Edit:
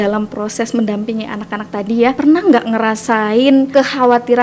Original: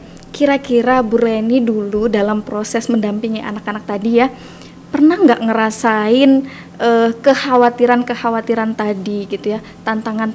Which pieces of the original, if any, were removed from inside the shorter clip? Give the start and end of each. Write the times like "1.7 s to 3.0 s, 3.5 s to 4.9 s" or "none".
4.3 s to 4.9 s, 6.4 s to 7.2 s